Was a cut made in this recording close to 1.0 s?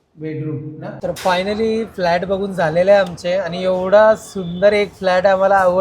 yes; 1 cut; at 1.0 s

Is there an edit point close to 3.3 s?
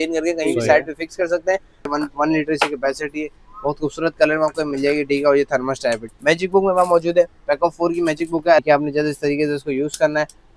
no; 3 cuts; at 1.9 s, 6.1 s, 8.6 s

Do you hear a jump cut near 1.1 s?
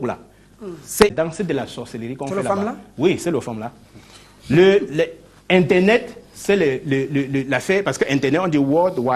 yes; 1 cut; at 1.1 s

